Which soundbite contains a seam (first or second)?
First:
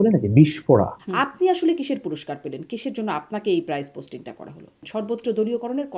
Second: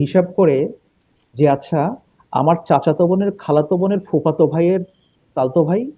first